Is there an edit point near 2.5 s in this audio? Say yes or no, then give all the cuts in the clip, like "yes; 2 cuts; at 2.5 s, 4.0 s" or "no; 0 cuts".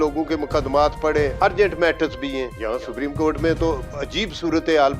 yes; 2 cuts; at 1.3 s, 2.5 s